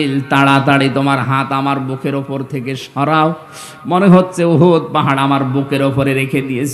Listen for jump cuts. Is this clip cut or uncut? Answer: uncut